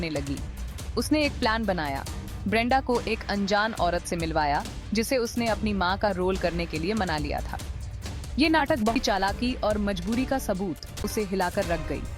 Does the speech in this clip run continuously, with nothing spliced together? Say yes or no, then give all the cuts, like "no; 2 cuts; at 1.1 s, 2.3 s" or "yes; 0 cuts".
no; 2 cuts; at 9.0 s, 11.0 s